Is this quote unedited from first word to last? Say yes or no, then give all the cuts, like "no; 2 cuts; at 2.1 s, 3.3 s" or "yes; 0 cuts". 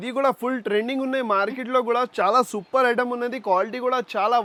yes; 0 cuts